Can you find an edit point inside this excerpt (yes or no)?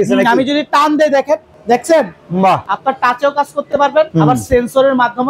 yes